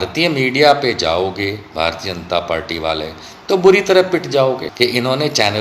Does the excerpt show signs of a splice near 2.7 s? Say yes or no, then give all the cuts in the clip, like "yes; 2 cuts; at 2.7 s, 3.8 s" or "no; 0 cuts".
no; 1 cut; at 4.7 s